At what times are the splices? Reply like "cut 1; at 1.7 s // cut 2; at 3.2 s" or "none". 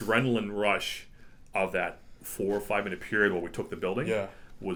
none